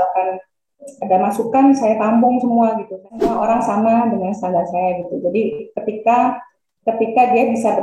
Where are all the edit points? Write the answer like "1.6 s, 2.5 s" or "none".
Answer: 3.3 s